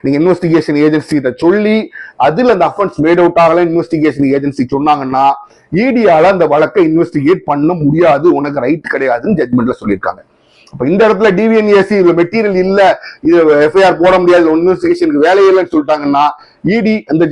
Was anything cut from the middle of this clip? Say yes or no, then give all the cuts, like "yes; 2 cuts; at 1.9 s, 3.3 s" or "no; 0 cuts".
no; 0 cuts